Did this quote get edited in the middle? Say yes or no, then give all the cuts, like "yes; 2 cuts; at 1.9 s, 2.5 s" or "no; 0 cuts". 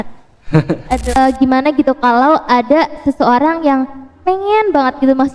yes; 1 cut; at 1.2 s